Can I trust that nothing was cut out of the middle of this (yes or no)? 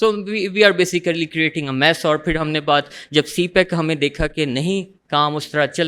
yes